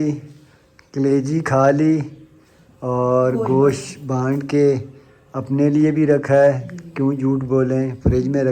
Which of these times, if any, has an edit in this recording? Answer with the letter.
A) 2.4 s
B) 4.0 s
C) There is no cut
C